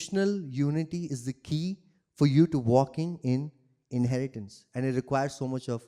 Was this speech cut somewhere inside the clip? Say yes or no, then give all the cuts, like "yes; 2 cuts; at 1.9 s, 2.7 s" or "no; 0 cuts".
no; 0 cuts